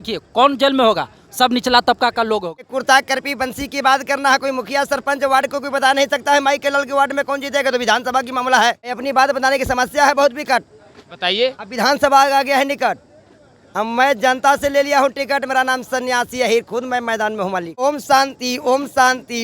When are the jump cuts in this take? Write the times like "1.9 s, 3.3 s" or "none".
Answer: 2.7 s, 9.0 s, 17.8 s